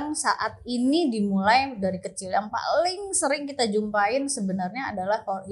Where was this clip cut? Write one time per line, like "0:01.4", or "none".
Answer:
none